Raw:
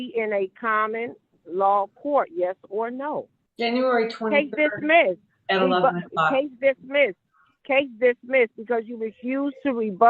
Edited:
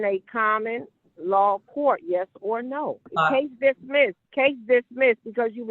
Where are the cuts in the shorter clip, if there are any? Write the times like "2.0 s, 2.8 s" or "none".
3.1 s, 4.2 s